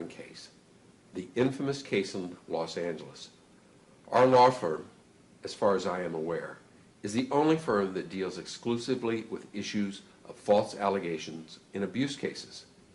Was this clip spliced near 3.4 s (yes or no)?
yes